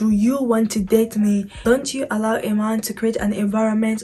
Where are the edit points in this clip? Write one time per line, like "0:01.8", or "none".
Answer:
0:01.5